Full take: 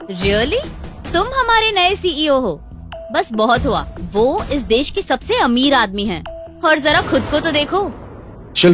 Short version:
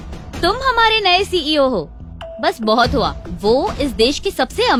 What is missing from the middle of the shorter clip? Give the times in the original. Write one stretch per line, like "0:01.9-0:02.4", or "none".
none